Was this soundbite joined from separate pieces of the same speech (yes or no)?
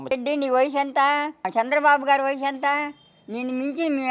yes